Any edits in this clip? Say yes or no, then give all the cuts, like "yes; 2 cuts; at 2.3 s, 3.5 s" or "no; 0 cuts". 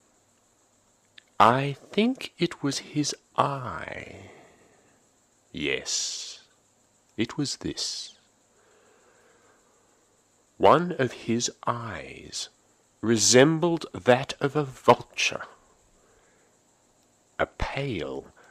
no; 0 cuts